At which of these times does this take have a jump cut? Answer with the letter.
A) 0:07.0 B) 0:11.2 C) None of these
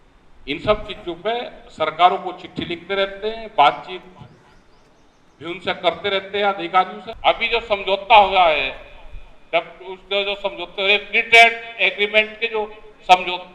A